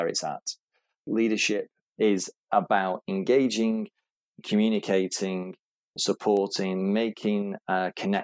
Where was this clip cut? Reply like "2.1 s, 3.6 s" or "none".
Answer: 1.0 s, 5.9 s